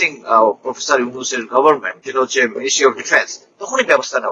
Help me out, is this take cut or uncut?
cut